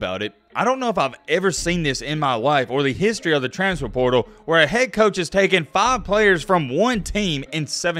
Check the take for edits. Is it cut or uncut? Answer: uncut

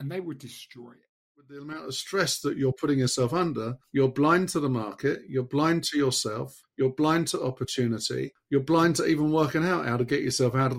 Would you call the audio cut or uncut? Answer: cut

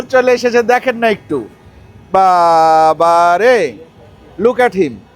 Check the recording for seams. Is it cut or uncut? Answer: uncut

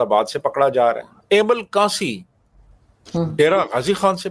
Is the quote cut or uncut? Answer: cut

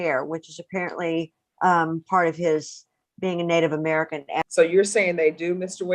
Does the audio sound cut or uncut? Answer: cut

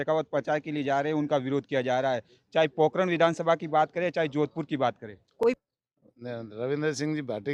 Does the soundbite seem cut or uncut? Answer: cut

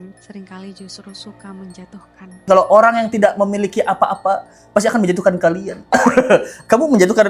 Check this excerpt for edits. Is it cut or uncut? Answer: cut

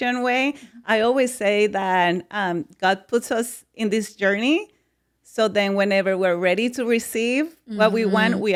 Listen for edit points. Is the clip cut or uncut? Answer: uncut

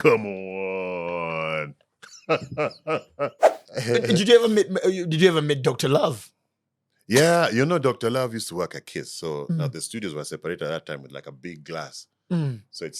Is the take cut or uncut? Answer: cut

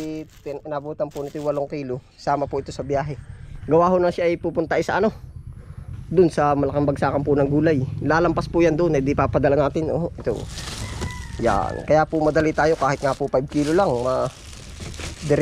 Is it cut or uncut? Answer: uncut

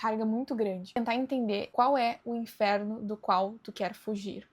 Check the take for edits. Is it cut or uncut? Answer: cut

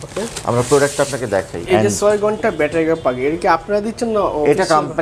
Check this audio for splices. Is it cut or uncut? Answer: cut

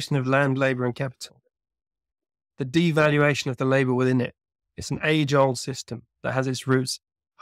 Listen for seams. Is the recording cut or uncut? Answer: uncut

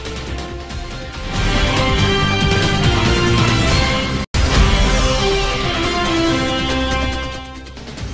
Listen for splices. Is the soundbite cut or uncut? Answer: uncut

